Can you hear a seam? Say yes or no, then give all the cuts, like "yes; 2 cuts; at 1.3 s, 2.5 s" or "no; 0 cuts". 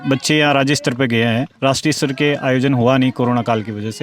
no; 0 cuts